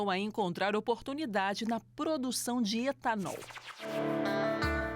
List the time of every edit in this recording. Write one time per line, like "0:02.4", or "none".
0:03.9